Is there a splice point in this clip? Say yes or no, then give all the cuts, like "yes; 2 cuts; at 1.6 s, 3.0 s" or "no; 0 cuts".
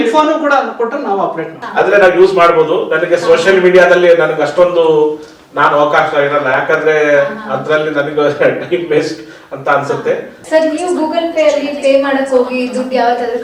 yes; 2 cuts; at 1.6 s, 10.3 s